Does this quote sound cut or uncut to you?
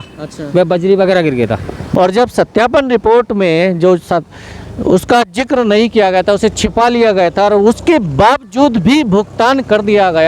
cut